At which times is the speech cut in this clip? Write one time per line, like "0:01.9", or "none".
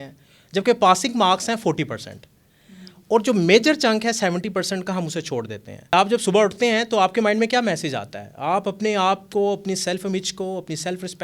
0:05.9